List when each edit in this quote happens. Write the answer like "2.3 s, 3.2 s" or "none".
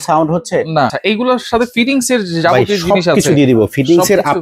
1.0 s